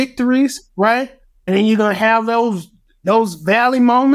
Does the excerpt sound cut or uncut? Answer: cut